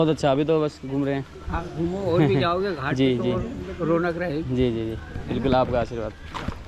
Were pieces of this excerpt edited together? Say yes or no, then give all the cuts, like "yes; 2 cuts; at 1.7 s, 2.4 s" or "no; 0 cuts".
no; 0 cuts